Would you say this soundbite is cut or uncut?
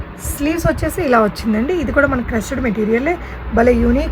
uncut